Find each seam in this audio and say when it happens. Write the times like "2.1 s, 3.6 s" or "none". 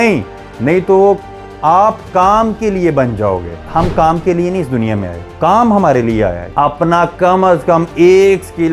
3.6 s, 5.2 s, 6.4 s